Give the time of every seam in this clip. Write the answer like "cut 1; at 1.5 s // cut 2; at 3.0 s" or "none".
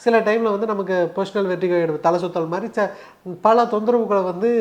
none